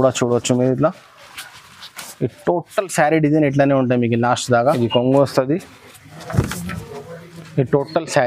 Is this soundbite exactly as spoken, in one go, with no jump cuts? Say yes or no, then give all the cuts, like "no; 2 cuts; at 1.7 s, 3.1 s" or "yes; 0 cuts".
no; 1 cut; at 4.7 s